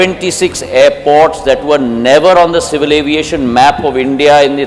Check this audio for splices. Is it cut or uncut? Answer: uncut